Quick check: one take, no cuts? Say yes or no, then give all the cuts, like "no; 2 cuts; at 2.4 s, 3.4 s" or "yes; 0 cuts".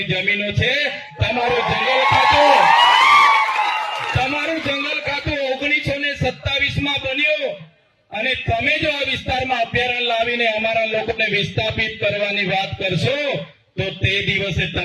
yes; 0 cuts